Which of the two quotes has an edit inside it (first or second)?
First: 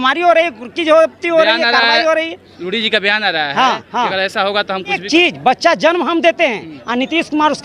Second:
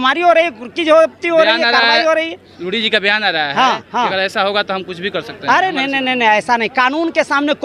first